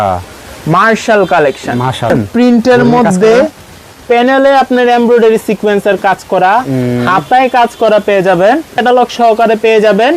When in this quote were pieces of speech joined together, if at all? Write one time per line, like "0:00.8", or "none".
0:02.1
0:08.8